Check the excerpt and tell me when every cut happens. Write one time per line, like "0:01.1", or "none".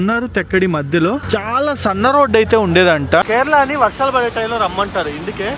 0:03.2